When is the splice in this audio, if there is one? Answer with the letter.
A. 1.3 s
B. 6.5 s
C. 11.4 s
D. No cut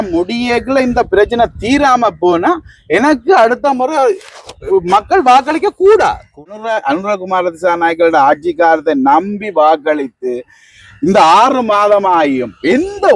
B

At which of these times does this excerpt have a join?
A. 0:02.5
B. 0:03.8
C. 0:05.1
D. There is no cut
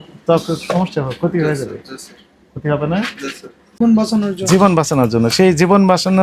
B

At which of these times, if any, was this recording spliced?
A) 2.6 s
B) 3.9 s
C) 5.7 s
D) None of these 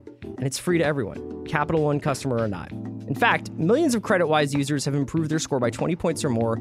D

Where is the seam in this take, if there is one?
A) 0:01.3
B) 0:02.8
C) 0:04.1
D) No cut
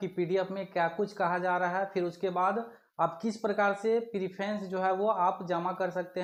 D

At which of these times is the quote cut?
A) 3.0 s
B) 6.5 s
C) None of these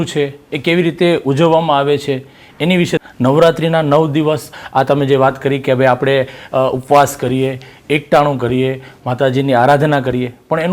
A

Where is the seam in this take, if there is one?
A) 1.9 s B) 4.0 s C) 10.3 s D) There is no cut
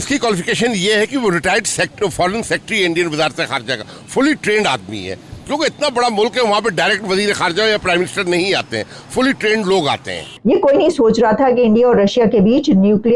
C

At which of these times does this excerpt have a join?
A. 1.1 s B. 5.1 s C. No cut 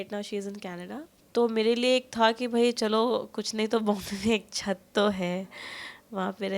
A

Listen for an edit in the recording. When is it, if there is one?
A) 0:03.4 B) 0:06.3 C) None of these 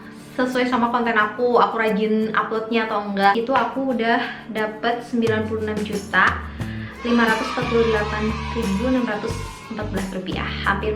A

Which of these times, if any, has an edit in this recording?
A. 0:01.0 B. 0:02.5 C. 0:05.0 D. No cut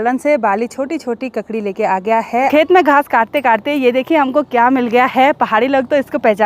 B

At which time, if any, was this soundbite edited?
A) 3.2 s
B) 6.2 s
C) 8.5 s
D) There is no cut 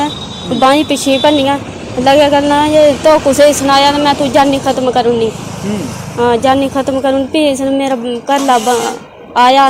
D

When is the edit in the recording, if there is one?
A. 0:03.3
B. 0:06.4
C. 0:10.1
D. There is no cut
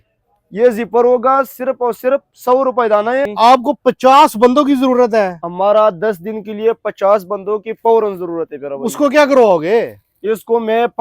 A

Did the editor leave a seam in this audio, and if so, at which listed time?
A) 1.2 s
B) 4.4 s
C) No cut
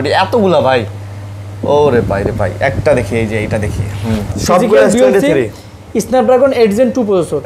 B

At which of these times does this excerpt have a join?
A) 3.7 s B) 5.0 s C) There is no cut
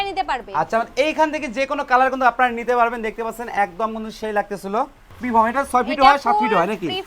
B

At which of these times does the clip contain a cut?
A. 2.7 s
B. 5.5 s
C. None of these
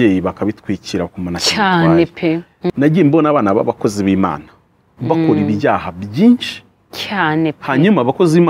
A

